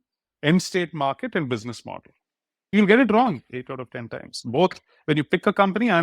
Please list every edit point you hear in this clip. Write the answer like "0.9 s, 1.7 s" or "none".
2.7 s